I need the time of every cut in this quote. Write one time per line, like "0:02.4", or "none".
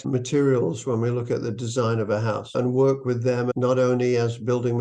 0:02.4
0:03.5